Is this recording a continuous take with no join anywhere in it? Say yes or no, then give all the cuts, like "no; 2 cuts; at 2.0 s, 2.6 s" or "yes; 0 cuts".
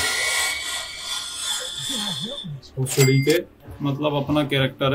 no; 1 cut; at 3.6 s